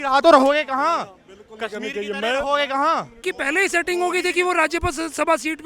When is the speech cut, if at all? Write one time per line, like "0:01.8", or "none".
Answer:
0:03.2